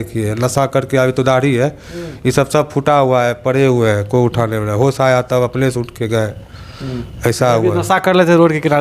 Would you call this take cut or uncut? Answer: uncut